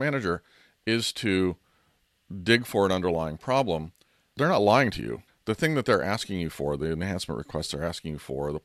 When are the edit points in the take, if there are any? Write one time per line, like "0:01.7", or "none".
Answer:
0:04.3
0:05.3